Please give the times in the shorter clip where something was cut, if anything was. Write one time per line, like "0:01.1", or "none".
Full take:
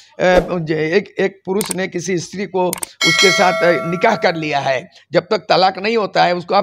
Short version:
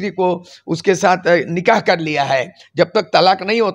none

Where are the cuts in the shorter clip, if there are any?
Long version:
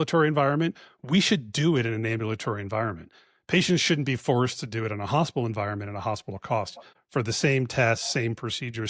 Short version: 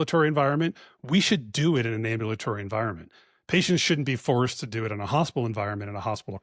none

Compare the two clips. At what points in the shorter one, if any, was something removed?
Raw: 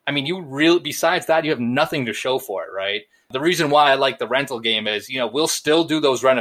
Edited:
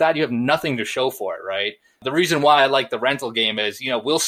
none

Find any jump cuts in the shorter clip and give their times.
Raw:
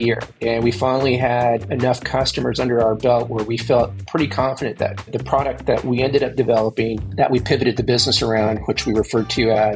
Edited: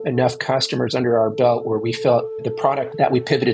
0:02.6

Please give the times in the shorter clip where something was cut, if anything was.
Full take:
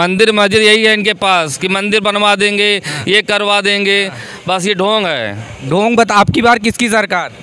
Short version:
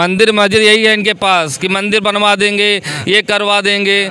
none

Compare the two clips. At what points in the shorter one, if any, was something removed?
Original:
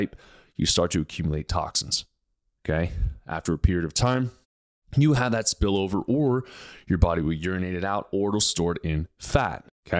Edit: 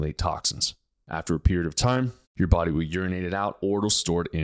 0:00.9
0:02.2

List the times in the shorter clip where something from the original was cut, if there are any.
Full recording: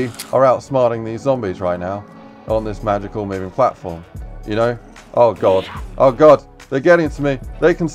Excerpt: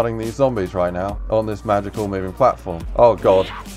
0:01.2
0:02.8

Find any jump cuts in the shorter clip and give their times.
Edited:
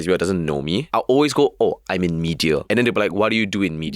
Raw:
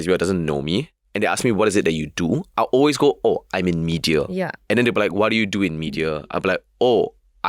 0:00.9
0:02.6

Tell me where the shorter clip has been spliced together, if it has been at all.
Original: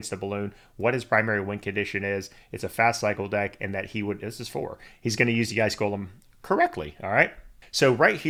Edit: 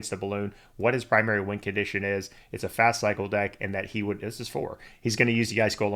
none

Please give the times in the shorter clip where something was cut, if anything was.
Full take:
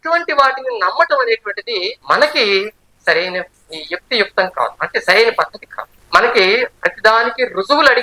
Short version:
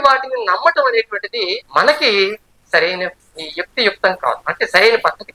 none

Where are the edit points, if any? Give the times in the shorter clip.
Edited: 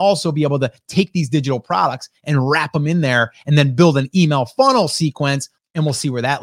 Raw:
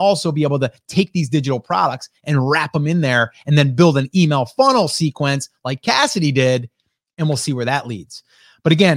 0:05.5

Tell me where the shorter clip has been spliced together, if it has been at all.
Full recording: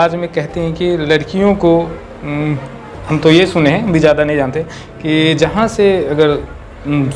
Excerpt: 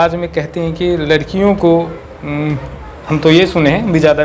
none

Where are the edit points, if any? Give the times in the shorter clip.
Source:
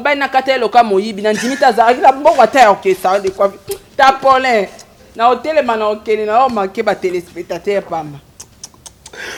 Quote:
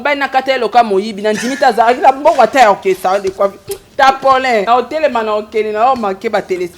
0:04.6

